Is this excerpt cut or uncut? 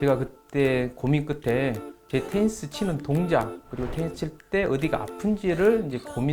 uncut